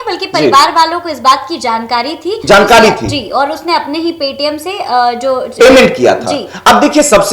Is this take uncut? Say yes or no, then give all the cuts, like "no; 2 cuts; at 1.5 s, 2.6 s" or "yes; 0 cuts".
yes; 0 cuts